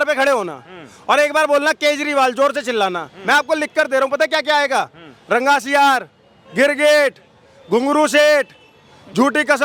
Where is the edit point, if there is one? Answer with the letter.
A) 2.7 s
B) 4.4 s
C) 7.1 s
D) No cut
D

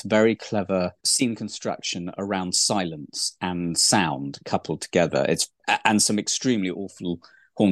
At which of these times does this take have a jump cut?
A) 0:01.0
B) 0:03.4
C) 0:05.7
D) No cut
C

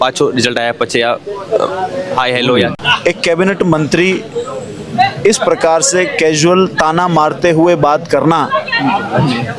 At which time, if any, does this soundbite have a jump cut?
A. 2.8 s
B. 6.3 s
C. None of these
A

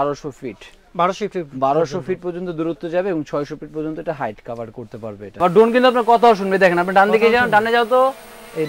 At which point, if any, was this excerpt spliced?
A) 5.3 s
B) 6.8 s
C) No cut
A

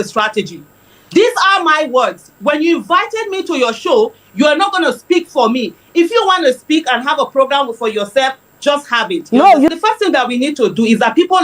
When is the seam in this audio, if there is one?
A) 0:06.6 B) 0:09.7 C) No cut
B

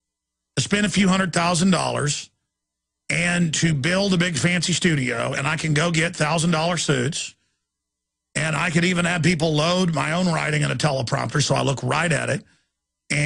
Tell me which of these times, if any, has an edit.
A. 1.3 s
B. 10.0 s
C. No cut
A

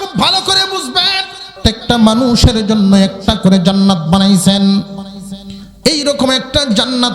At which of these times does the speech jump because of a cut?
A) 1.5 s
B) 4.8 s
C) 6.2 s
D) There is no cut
A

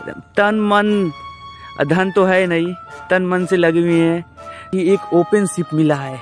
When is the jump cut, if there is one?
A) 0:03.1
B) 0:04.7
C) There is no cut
B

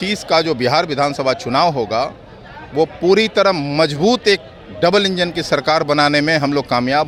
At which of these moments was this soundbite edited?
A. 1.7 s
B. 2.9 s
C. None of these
C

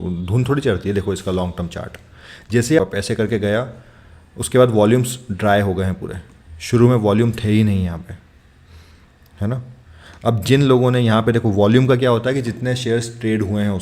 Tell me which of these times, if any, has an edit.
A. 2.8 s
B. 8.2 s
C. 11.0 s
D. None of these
A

